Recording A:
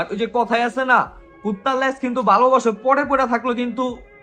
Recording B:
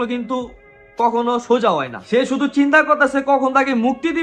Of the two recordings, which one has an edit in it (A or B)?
B